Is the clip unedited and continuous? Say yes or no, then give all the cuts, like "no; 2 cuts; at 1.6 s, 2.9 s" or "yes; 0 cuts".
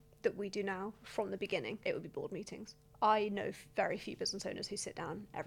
no; 2 cuts; at 1.8 s, 2.8 s